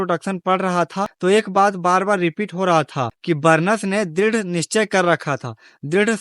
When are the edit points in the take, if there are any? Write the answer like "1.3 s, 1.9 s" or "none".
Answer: 1.1 s, 3.1 s